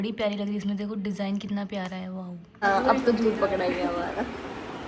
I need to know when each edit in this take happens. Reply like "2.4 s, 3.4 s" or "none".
2.4 s